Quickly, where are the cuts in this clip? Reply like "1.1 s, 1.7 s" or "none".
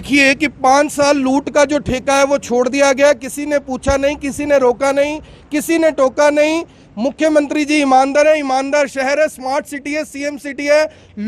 none